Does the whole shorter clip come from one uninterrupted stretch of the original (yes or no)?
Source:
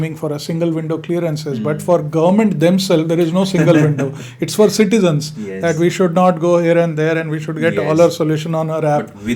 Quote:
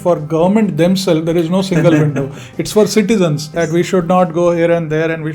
no